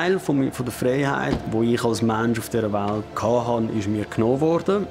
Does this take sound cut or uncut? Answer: cut